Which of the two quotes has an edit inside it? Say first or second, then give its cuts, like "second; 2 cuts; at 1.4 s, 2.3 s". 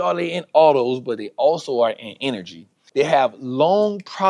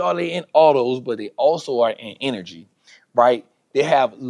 first; 1 cut; at 2.8 s